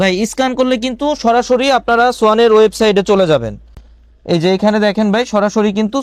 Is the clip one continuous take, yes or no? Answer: yes